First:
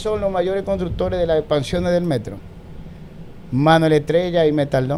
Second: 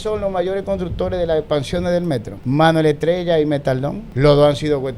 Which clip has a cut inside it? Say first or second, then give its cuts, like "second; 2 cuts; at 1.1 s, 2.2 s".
second; 2 cuts; at 2.3 s, 4.0 s